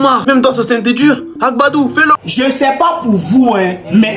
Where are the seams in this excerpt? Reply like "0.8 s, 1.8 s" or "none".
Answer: 2.2 s